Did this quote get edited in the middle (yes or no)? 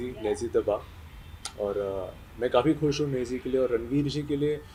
no